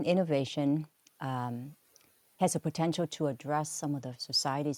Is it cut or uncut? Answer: uncut